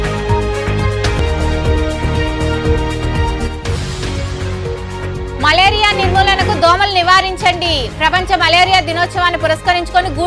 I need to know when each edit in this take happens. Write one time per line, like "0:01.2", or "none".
none

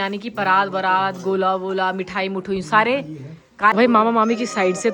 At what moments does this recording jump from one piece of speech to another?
0:03.7

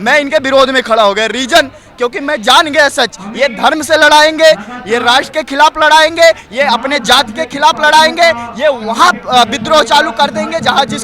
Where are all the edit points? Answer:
none

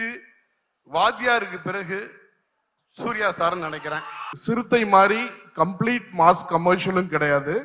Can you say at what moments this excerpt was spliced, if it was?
0:04.3

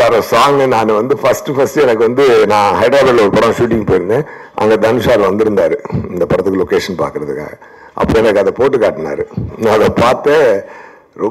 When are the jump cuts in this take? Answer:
none

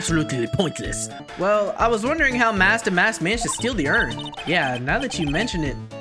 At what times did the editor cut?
0:01.2
0:04.3

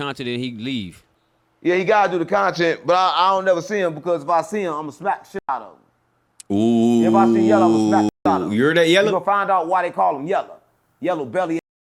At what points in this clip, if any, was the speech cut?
none

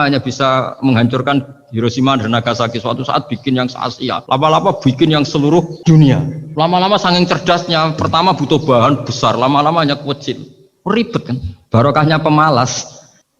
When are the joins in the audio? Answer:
0:04.2
0:05.7
0:06.4

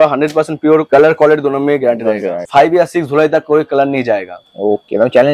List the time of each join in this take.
0:02.4

